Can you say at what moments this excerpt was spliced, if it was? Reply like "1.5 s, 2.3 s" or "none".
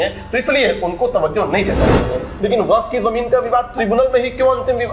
2.2 s